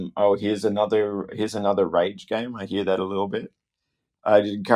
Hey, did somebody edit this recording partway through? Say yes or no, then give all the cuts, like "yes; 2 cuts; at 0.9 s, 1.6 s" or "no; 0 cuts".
no; 0 cuts